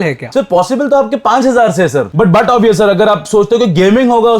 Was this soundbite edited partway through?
yes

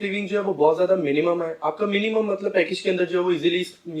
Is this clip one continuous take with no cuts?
yes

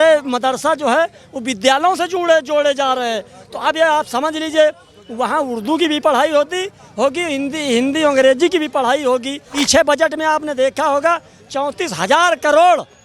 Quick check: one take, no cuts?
no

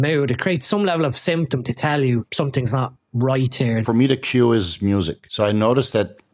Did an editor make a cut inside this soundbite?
yes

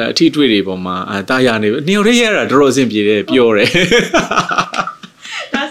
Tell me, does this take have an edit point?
no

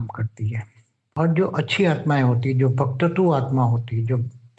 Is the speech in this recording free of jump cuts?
no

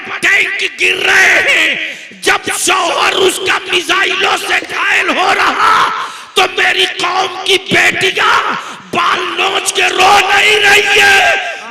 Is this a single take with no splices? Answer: yes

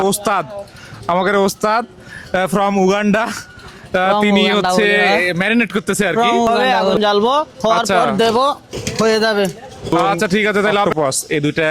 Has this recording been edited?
yes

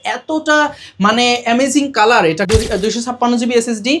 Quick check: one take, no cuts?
no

